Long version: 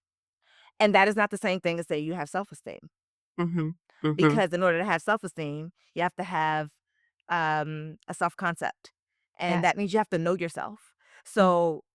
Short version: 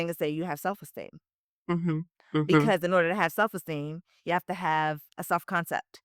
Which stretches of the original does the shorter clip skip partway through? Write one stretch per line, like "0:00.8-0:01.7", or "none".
0:06.8-0:08.0